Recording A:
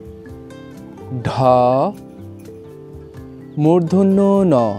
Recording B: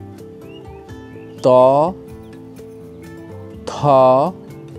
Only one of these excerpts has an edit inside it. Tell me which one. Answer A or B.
A